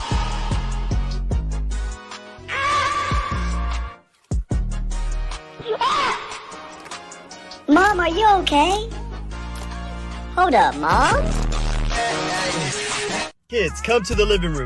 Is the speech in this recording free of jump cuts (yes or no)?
no